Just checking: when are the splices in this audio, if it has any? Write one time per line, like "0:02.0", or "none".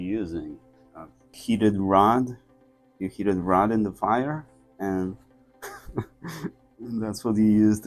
0:01.3
0:06.6